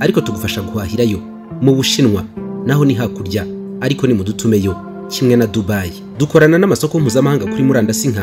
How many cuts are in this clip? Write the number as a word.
one